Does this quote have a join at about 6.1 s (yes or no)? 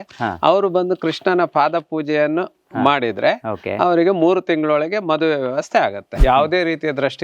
yes